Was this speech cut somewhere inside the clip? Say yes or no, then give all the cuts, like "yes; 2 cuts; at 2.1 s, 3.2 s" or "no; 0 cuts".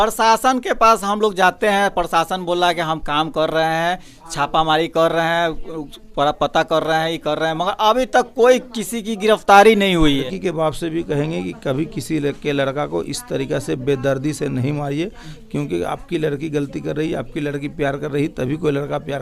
yes; 1 cut; at 10.3 s